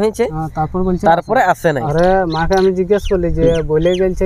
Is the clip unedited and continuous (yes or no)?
no